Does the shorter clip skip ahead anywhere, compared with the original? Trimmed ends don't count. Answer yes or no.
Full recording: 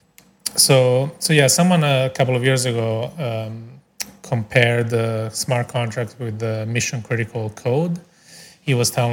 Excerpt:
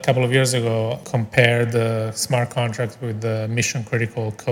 yes